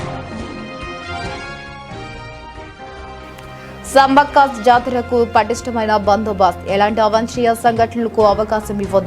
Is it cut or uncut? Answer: uncut